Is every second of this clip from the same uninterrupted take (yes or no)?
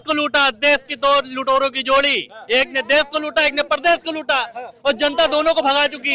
yes